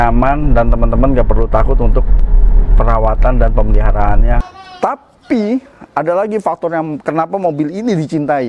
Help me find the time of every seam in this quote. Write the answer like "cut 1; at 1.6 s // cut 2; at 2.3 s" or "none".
cut 1; at 4.5 s

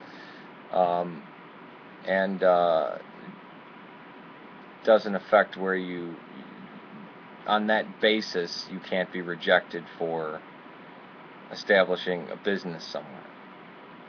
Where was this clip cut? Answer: none

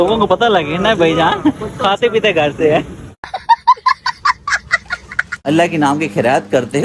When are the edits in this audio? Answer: cut 1; at 5.4 s

